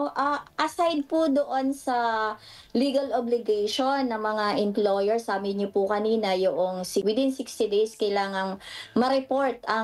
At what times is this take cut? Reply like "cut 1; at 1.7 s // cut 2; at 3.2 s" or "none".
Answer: cut 1; at 7.0 s